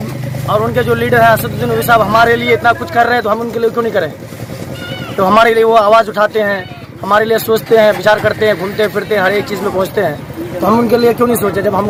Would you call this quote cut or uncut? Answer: uncut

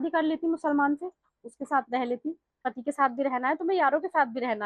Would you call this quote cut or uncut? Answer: cut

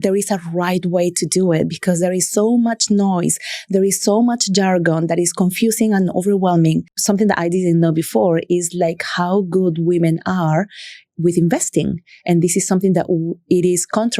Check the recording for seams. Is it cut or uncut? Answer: cut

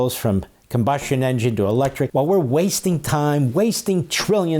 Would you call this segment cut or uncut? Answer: cut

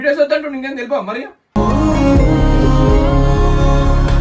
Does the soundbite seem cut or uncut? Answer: uncut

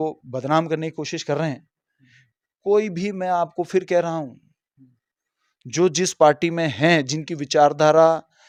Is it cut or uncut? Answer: uncut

